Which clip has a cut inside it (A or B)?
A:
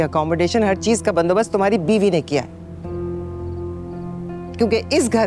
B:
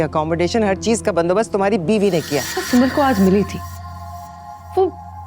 B